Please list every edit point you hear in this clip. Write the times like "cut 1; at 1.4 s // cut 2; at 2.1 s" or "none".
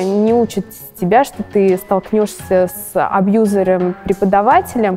none